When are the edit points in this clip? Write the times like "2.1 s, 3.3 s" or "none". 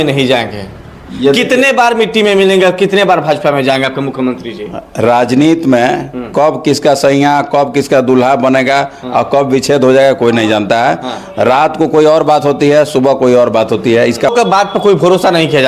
14.3 s